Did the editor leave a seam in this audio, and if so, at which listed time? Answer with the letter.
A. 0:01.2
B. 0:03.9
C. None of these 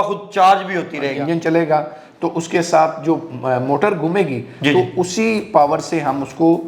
A